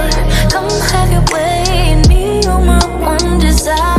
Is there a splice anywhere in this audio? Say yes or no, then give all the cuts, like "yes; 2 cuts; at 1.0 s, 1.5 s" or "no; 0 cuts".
no; 0 cuts